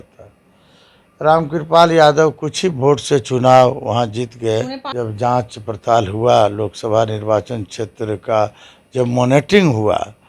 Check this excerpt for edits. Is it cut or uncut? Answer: cut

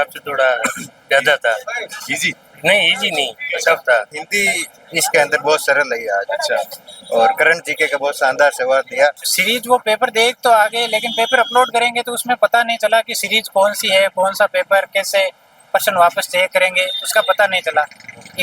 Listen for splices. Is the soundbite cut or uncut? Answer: cut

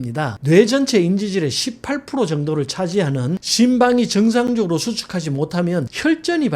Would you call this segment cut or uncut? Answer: cut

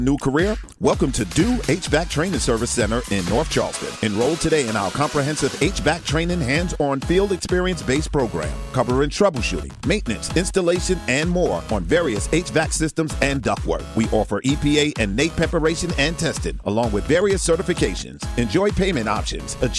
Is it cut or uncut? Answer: uncut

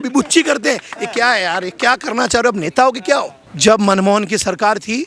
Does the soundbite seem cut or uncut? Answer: cut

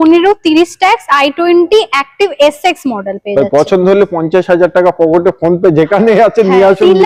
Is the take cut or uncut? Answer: uncut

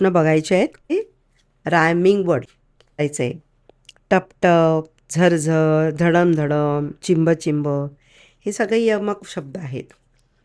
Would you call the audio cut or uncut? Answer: cut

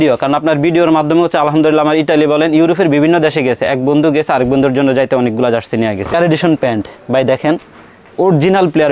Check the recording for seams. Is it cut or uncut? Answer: cut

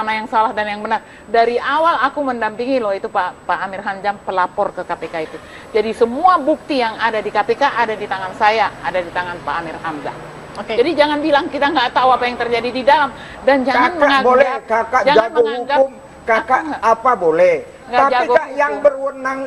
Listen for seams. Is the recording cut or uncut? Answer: uncut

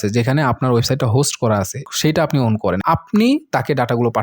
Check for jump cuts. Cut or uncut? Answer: cut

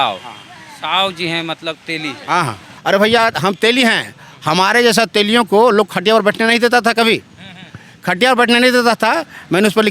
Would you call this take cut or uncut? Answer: cut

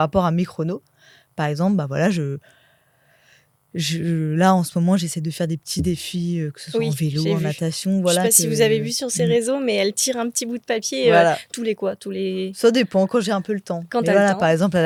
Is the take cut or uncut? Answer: uncut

